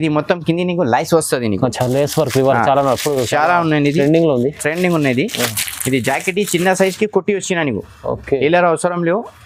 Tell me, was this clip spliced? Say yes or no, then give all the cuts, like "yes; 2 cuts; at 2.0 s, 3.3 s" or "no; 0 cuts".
no; 0 cuts